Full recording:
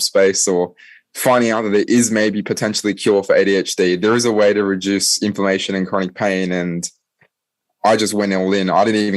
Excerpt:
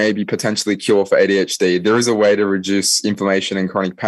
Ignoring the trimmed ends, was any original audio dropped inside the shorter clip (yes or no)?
no